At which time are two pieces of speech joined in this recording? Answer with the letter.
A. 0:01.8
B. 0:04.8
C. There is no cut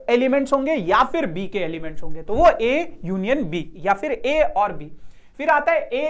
C